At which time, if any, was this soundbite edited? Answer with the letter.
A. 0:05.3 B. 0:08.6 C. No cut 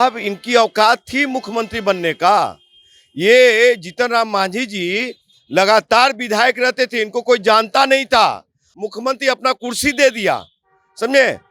B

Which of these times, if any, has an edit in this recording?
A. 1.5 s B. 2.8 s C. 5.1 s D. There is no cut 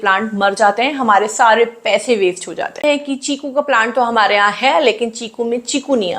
B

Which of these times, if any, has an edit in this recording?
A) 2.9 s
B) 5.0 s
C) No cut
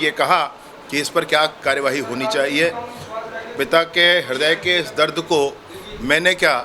C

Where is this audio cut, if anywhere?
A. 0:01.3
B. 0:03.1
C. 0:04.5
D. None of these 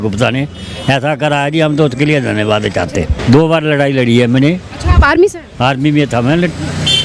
B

